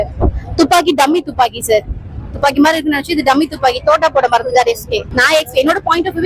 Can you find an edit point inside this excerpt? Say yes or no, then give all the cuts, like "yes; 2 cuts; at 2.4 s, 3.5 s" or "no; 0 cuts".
no; 0 cuts